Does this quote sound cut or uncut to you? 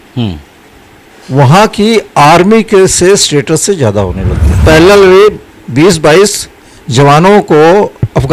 cut